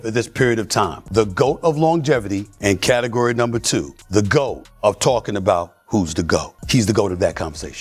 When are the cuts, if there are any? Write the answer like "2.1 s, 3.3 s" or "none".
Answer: 1.0 s, 2.4 s, 4.0 s, 4.7 s, 6.6 s